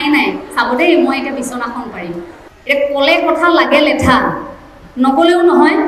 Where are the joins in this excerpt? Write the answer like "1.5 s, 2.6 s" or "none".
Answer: 2.4 s